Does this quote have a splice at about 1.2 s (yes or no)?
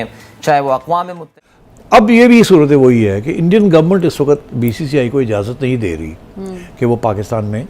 yes